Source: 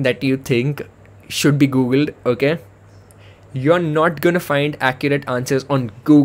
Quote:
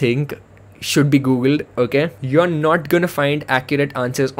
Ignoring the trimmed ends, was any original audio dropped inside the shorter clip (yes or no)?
yes